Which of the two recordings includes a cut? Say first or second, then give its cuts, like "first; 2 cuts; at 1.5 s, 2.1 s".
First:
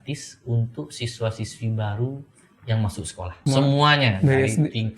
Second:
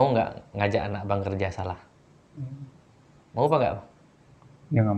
first; 1 cut; at 3.4 s